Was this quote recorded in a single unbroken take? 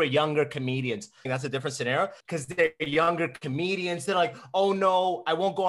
no; 2 cuts; at 1.3 s, 2.2 s

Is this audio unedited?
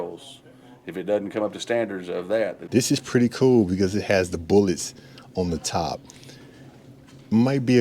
no; 1 cut; at 2.6 s

